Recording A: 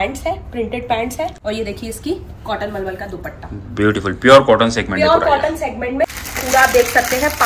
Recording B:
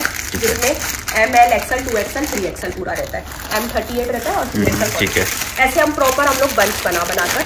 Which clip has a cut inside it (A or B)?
A